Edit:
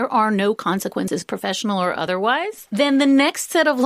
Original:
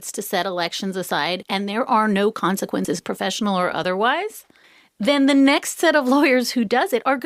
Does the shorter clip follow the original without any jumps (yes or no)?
no